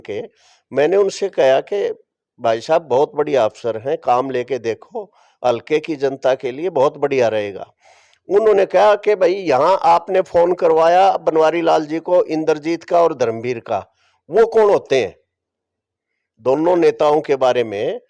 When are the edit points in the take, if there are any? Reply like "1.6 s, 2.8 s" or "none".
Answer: none